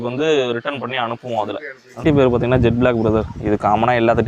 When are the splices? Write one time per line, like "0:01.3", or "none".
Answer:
0:01.9